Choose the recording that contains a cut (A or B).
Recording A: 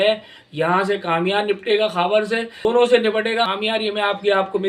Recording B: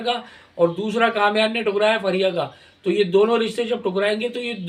A